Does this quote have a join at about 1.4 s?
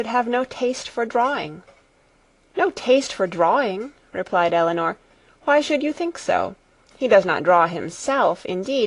yes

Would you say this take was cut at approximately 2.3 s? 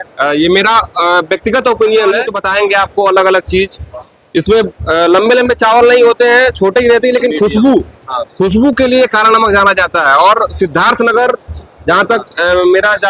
no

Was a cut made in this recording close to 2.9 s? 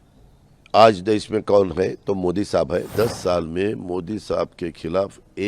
yes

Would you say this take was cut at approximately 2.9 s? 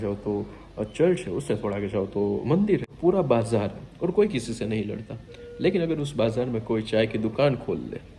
yes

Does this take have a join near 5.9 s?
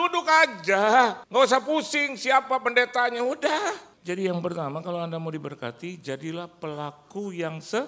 no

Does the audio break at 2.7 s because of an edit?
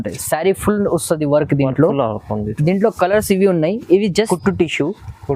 no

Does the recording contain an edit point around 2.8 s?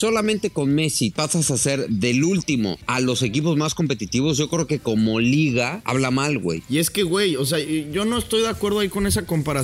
yes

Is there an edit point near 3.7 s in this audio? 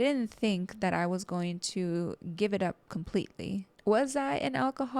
yes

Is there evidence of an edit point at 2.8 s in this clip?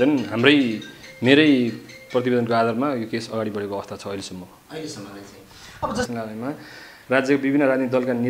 no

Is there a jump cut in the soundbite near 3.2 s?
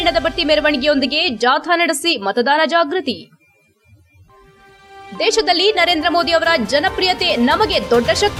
no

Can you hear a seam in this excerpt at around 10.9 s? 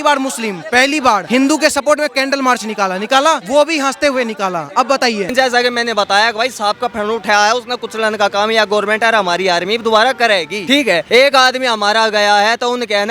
yes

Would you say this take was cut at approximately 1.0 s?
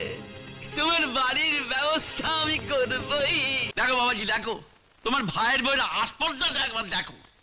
no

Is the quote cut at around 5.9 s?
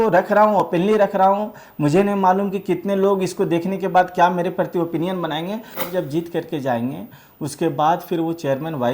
yes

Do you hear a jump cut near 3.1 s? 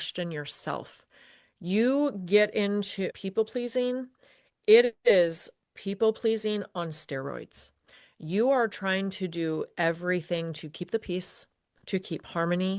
yes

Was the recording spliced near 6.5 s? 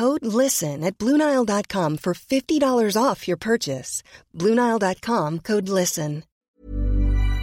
yes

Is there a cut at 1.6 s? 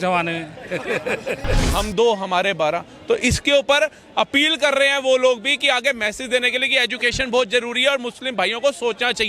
yes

